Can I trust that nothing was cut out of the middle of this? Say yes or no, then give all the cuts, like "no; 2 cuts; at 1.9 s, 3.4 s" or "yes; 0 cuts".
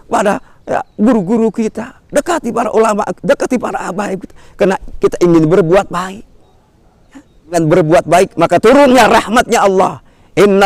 no; 1 cut; at 7.5 s